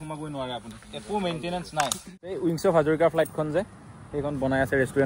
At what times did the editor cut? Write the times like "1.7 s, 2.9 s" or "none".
2.3 s